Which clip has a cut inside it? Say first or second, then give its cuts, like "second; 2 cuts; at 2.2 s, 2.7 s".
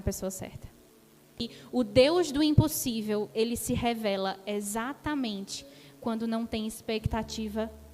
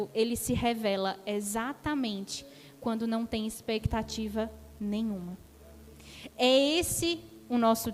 first; 1 cut; at 1.4 s